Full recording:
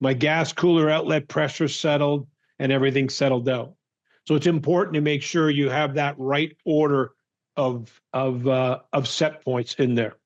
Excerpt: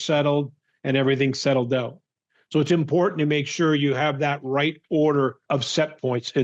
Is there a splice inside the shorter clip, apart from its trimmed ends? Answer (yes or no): yes